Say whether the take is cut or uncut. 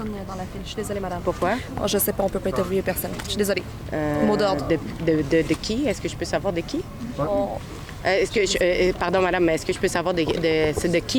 uncut